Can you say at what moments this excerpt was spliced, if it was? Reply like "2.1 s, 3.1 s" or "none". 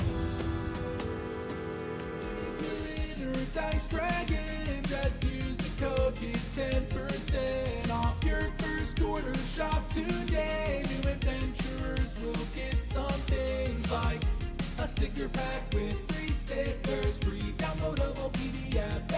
2.7 s